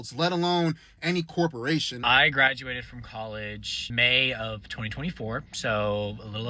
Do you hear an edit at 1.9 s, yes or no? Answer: yes